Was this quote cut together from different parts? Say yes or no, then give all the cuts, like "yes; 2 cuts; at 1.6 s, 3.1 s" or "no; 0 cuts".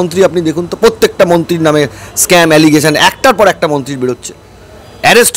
no; 0 cuts